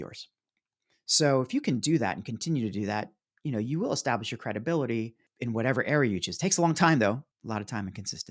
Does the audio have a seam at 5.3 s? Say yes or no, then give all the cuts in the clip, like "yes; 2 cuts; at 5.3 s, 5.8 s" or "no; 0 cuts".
yes; 2 cuts; at 5.3 s, 7.3 s